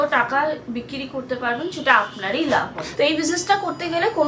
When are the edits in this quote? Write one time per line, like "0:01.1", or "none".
0:02.9